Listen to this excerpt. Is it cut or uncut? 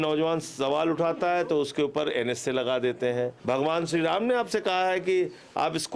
cut